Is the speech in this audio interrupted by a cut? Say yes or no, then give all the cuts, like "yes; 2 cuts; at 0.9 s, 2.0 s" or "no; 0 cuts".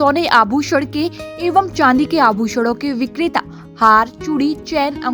no; 0 cuts